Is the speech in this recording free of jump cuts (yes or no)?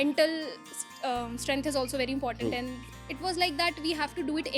no